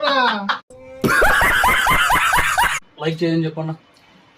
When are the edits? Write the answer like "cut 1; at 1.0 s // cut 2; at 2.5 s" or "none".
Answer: cut 1; at 2.8 s